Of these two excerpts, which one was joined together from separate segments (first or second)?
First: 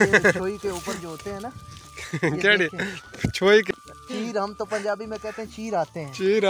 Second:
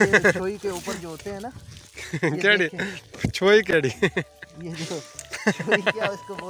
first